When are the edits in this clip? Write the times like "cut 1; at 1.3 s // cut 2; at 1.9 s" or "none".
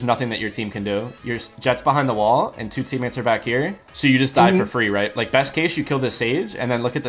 none